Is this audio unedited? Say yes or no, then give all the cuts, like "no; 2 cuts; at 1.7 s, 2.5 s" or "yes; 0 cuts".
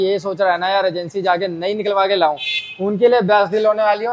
yes; 0 cuts